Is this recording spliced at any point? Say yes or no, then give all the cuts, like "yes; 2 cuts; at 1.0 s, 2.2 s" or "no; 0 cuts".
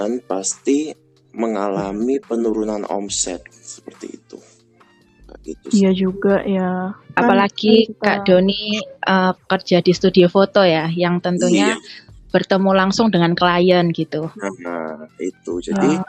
no; 0 cuts